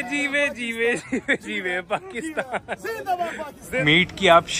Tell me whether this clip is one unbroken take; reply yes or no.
no